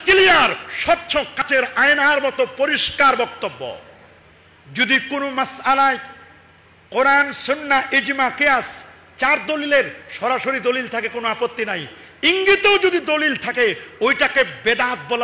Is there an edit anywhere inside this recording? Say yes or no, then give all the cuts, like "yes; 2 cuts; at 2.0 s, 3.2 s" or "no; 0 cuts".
yes; 1 cut; at 1.4 s